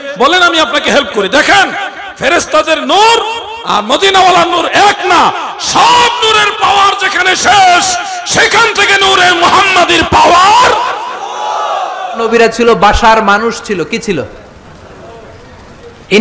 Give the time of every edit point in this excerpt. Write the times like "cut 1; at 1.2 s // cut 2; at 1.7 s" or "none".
cut 1; at 12.2 s